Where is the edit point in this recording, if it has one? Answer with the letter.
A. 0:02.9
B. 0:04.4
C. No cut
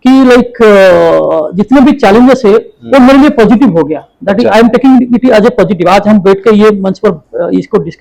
C